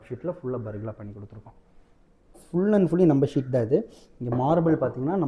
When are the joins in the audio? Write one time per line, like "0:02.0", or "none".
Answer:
0:02.4